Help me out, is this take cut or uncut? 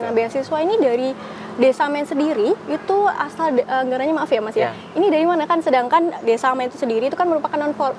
uncut